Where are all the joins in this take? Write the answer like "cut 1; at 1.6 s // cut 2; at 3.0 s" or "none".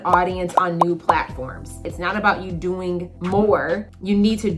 cut 1; at 1.8 s